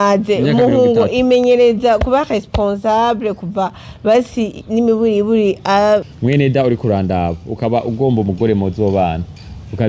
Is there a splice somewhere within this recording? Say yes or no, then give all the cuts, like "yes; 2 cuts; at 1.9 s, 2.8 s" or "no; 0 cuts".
yes; 1 cut; at 6.1 s